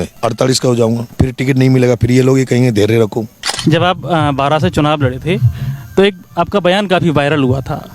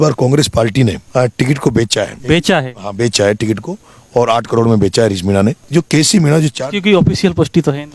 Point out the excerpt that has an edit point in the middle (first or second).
first